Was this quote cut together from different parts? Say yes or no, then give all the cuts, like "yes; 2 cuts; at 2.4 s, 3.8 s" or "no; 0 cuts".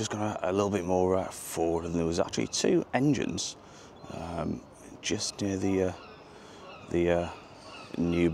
no; 0 cuts